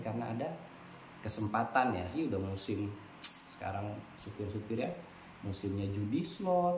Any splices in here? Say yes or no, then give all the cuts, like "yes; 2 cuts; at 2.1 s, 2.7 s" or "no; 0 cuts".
yes; 1 cut; at 2.1 s